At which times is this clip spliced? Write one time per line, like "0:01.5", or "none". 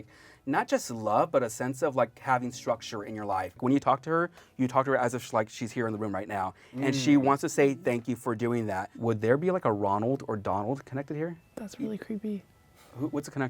0:03.6
0:08.9
0:11.5